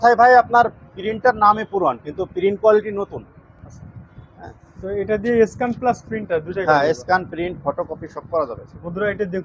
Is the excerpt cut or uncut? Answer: uncut